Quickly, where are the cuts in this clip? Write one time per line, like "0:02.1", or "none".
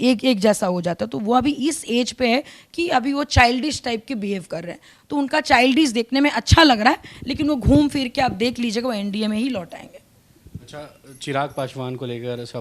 none